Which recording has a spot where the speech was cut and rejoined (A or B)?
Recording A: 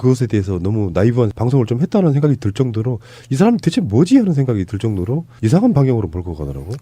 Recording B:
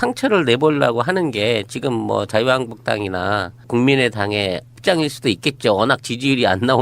A